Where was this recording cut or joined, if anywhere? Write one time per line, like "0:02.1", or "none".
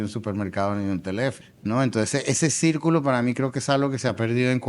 0:01.5